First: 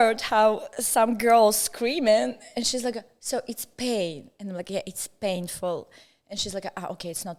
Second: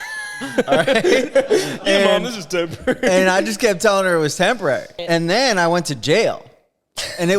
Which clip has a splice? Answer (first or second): second